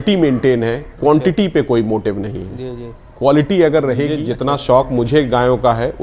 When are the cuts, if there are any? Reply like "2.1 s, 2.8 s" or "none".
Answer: 4.2 s